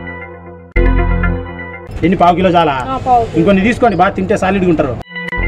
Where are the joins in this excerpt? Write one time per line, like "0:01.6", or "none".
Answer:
0:01.8